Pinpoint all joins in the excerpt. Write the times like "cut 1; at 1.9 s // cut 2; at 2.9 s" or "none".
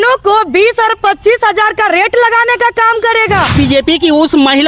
cut 1; at 3.5 s